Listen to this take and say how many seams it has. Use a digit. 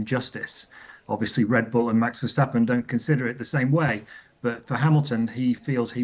0